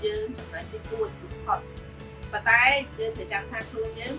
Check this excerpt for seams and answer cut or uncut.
cut